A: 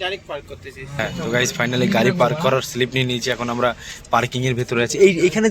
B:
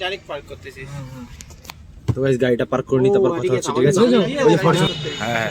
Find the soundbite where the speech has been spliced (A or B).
A